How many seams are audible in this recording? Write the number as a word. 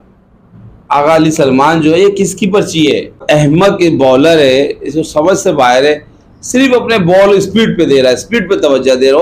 one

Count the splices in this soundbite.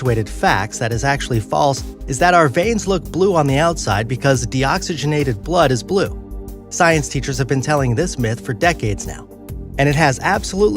one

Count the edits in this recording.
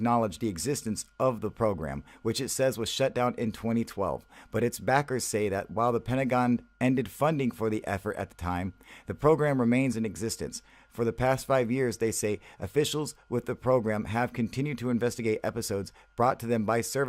one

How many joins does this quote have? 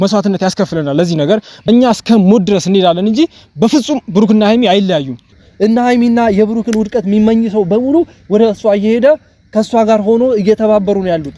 two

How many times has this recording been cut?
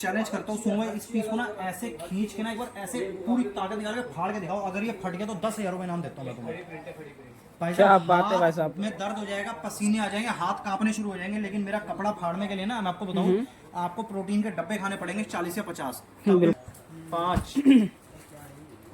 one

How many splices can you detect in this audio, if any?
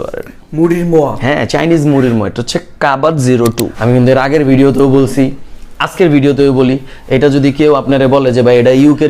one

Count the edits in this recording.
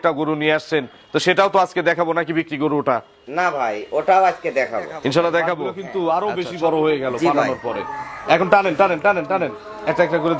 one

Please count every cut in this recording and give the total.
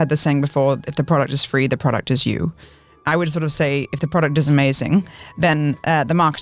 zero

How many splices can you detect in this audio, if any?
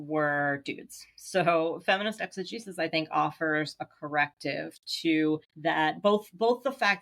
one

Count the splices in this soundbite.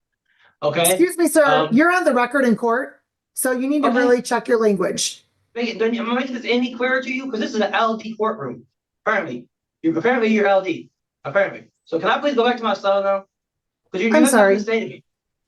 one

